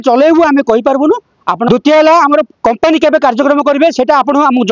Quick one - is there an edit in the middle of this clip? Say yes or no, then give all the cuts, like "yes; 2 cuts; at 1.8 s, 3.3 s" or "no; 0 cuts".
yes; 1 cut; at 1.7 s